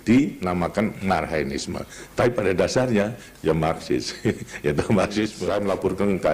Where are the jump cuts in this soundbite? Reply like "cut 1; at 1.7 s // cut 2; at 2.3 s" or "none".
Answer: cut 1; at 5.4 s